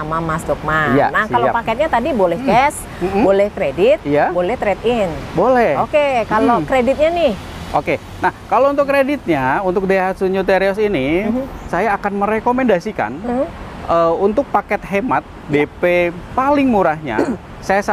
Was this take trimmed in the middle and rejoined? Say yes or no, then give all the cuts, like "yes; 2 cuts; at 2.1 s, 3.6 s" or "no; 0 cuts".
yes; 1 cut; at 11.7 s